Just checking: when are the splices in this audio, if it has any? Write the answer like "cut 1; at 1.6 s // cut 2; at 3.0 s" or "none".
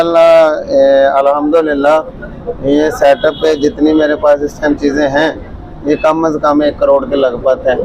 none